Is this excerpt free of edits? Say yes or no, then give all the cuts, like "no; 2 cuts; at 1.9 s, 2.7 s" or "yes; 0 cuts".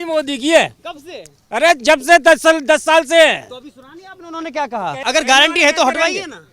no; 1 cut; at 5.0 s